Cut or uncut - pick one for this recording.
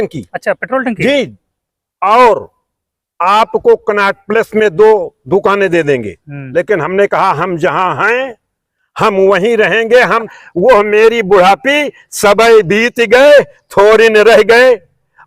cut